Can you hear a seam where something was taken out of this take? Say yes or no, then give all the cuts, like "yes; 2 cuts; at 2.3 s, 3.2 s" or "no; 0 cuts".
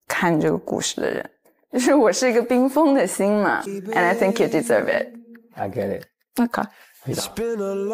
yes; 1 cut; at 3.7 s